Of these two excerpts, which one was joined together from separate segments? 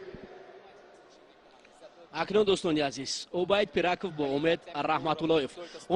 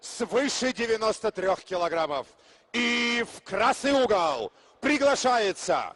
first; 1 cut; at 4.4 s

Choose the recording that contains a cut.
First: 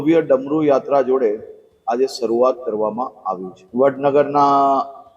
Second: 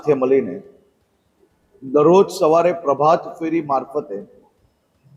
first; 1 cut; at 3.6 s

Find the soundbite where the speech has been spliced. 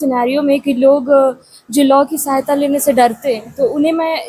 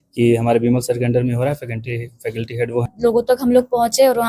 second; 1 cut; at 2.9 s

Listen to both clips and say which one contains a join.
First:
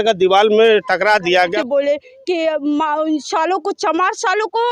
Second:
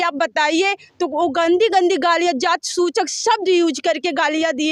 first; 1 cut; at 1.4 s

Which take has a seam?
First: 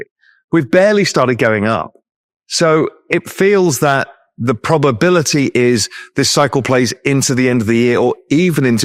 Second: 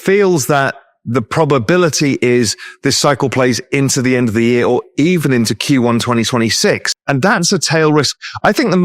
second; 1 cut; at 6.9 s

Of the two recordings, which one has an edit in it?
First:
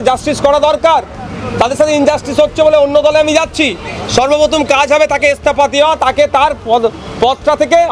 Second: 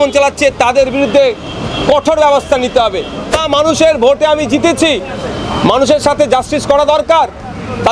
second; 1 cut; at 3.4 s

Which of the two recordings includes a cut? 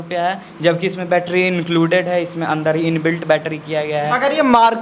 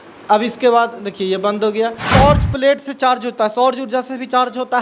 second; 1 cut; at 2.0 s

